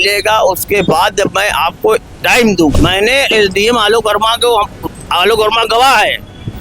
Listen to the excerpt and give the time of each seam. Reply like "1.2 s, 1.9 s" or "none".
2.7 s